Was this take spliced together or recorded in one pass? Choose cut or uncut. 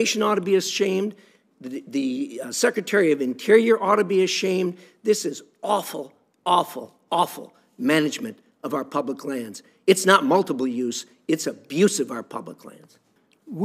uncut